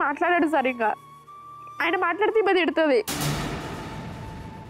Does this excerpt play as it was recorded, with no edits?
no; 2 cuts; at 1.0 s, 3.1 s

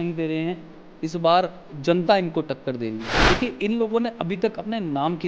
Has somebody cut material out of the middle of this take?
yes; 1 cut; at 3.1 s

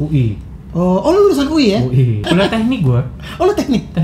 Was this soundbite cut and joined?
yes; 1 cut; at 2.3 s

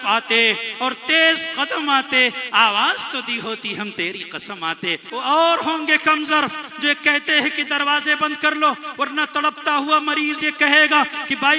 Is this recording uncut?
no; 1 cut; at 5.0 s

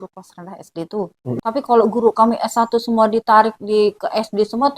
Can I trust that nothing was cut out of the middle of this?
no; 1 cut; at 1.4 s

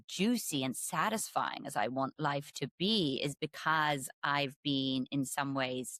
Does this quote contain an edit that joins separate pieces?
no; 0 cuts

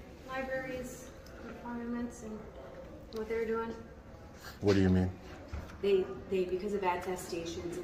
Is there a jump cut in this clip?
no; 0 cuts

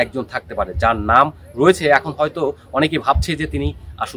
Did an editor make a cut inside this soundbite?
no; 0 cuts

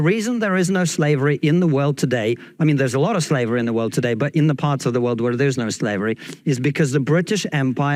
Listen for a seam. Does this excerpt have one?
no; 0 cuts

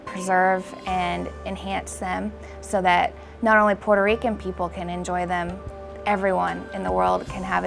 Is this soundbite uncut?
yes; 0 cuts

